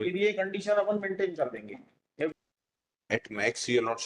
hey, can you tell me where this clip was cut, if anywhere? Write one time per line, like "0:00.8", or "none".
0:02.3